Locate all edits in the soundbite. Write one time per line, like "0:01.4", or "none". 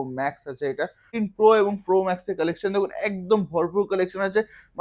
0:01.1